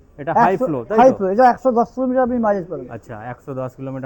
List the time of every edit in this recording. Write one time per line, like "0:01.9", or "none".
none